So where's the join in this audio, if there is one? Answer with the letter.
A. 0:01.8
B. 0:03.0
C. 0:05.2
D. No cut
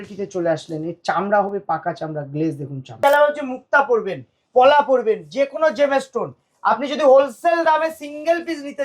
B